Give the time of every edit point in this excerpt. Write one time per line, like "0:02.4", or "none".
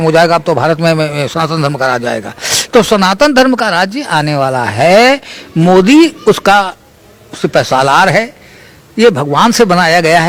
none